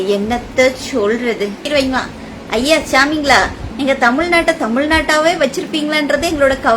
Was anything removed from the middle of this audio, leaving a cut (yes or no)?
yes